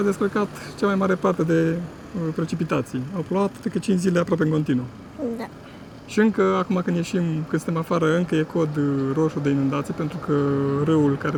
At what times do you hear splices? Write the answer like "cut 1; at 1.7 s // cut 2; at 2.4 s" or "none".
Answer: none